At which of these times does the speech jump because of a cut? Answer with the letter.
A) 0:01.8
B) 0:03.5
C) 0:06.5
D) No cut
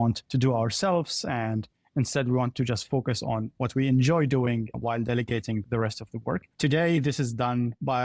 C